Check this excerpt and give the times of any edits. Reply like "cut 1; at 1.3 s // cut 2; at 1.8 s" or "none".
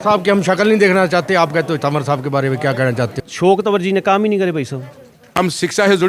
cut 1; at 3.2 s // cut 2; at 5.4 s